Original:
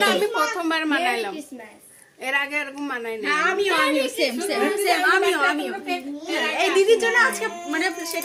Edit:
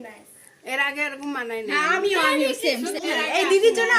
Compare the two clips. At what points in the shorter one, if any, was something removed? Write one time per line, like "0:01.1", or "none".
0:02.9